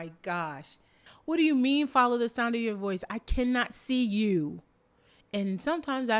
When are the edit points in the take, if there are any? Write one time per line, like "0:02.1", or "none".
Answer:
0:01.1